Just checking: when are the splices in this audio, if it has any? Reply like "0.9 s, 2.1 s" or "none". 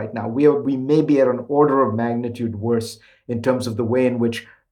none